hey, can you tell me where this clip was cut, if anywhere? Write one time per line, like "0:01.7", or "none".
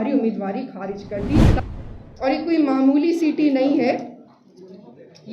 0:01.6